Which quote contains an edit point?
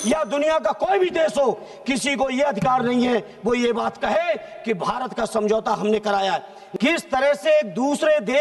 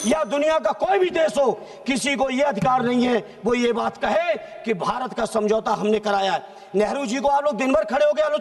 first; 1 cut; at 6.5 s

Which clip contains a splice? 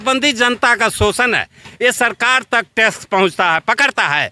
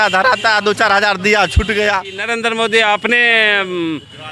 second; 1 cut; at 2.2 s

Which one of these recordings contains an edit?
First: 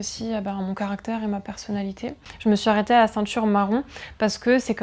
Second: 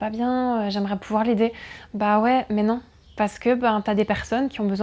first; 1 cut; at 2.3 s

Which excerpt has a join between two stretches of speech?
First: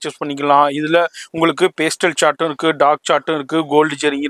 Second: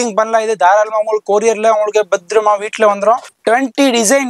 second; 1 cut; at 3.3 s

